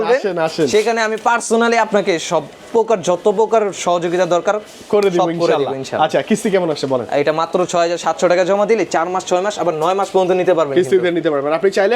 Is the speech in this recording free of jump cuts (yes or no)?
yes